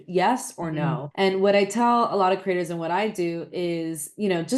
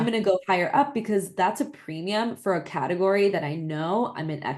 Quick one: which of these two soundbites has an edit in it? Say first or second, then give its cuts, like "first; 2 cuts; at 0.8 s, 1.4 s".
first; 1 cut; at 1.1 s